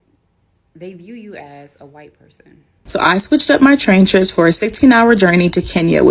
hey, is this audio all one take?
no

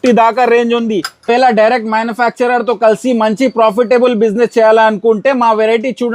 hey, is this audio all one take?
no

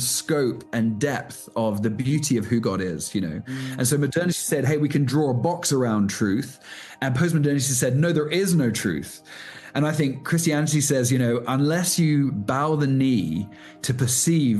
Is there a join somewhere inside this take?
no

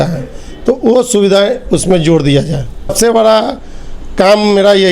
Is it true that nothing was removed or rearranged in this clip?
no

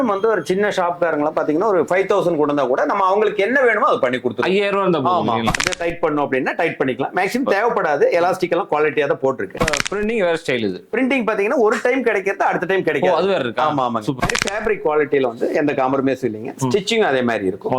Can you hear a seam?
yes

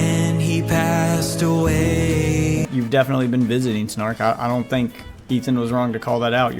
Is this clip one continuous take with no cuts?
no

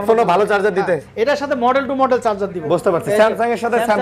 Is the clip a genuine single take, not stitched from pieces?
yes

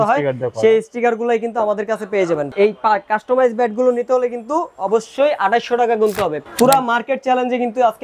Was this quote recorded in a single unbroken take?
no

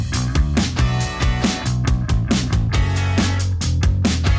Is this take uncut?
no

